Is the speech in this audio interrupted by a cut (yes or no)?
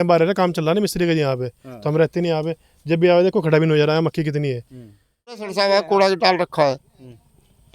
yes